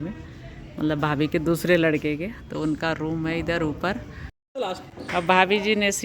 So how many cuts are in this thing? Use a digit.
1